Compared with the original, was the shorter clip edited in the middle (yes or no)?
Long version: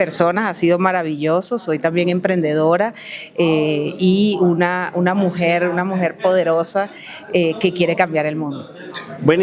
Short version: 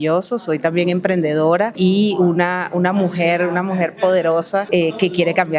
yes